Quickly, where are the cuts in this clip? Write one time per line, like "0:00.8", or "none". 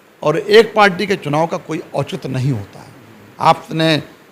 none